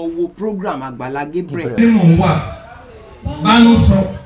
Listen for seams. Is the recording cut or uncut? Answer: cut